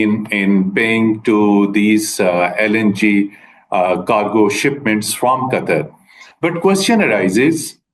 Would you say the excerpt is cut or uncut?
uncut